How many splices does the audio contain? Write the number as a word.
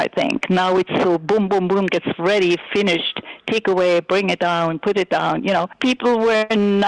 one